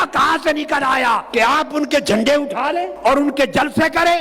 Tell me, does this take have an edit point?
yes; 2 cuts; at 1.2 s, 2.9 s

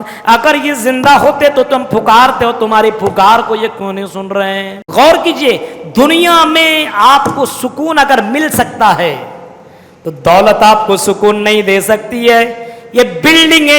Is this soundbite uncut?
no; 1 cut; at 4.8 s

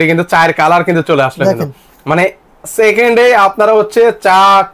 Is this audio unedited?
yes; 0 cuts

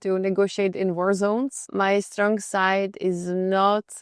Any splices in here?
no; 0 cuts

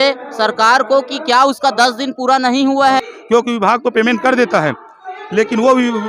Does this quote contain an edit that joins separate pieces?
yes; 1 cut; at 3.1 s

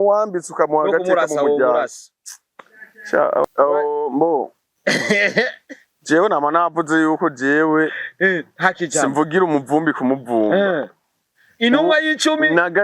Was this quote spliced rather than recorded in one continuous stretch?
yes; 1 cut; at 3.5 s

